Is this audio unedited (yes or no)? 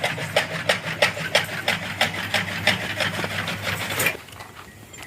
no